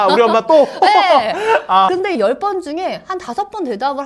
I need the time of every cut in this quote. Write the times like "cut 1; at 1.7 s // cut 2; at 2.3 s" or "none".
none